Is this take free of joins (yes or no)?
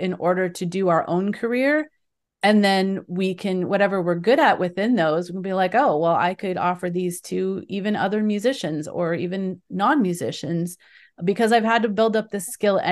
yes